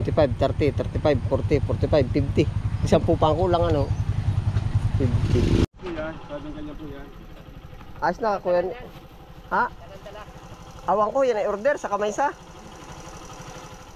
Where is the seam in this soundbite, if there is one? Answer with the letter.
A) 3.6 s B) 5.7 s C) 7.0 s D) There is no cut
B